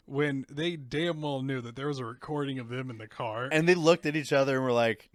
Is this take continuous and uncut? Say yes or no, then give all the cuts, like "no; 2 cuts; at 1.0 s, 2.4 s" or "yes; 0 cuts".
yes; 0 cuts